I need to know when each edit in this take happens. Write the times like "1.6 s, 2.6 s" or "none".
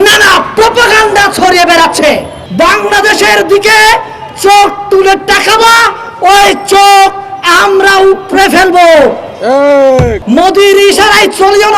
2.4 s, 10.2 s